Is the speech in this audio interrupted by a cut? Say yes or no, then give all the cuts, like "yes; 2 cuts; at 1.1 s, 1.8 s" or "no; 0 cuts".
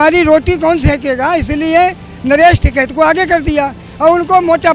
no; 0 cuts